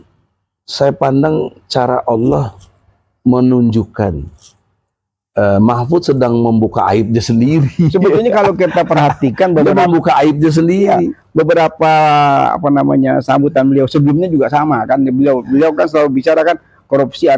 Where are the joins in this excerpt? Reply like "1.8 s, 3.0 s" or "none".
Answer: none